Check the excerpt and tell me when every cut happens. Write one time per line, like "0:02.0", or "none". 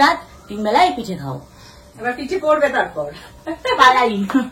0:03.4